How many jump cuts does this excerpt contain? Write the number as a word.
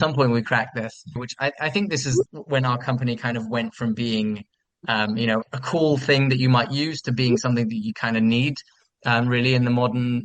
three